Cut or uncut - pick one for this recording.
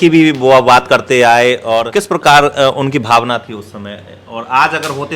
cut